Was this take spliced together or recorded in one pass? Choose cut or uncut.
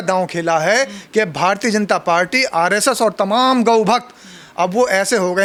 uncut